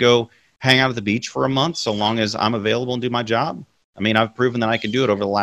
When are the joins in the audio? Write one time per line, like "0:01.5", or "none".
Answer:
none